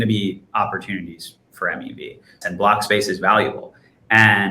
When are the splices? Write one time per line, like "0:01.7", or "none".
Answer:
0:02.4